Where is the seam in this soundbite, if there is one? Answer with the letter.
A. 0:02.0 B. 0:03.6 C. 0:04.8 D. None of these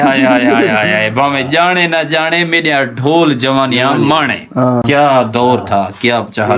D